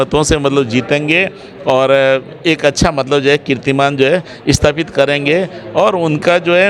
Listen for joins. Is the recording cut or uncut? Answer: uncut